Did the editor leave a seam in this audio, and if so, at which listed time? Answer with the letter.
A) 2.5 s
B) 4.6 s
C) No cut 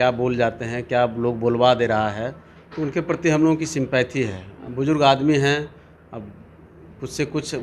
C